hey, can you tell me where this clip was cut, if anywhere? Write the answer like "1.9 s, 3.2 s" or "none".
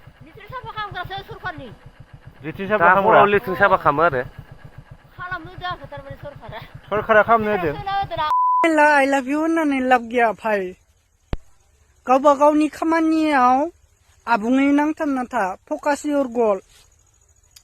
8.6 s